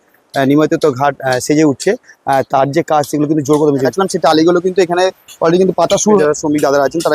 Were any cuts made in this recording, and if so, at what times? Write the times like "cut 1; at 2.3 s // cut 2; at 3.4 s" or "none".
cut 1; at 3.9 s // cut 2; at 6.2 s